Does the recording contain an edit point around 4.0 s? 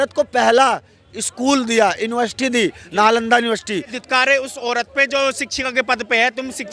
yes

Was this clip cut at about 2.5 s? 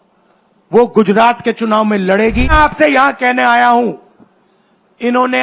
yes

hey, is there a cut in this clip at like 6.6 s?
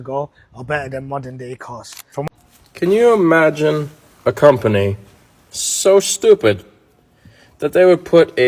no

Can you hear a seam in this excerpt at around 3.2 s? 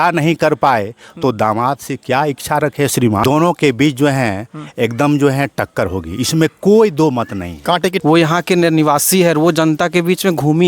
yes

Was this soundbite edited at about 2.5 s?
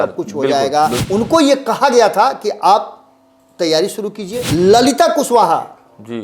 no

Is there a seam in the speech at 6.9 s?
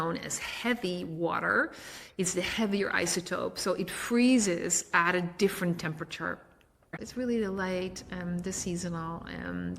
yes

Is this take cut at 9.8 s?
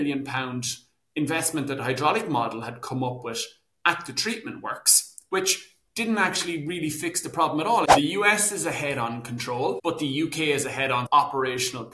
yes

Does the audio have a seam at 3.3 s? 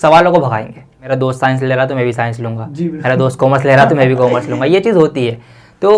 no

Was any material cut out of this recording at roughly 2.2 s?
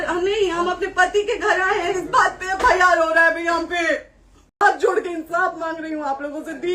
no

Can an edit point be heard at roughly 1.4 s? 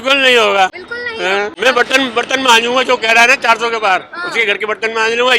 yes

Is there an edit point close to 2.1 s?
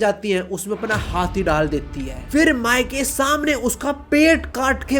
yes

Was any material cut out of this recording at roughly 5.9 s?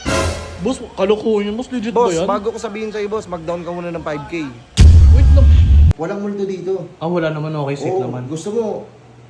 yes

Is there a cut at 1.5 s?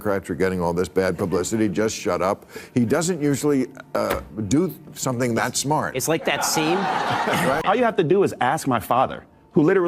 no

